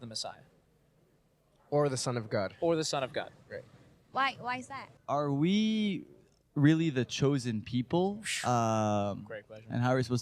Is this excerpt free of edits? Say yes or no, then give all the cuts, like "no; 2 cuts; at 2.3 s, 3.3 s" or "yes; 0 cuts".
no; 1 cut; at 4.9 s